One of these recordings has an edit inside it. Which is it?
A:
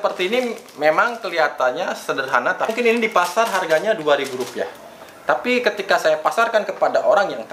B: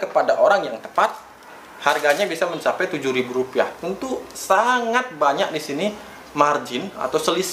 A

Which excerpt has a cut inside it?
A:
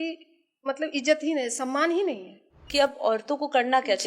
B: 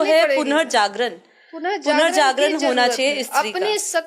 A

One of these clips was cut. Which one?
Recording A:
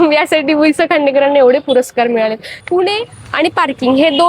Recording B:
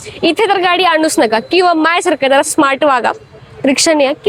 A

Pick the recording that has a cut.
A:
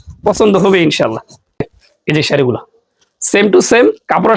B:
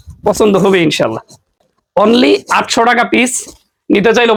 A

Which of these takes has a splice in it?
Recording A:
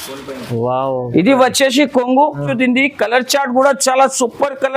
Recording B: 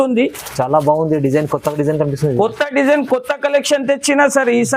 A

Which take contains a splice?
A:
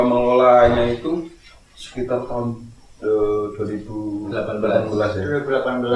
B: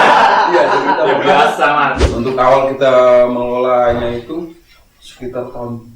B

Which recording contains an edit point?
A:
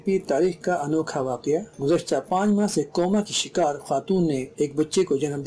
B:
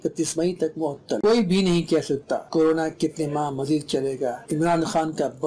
B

